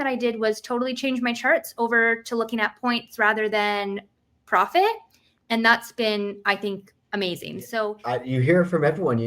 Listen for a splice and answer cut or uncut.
cut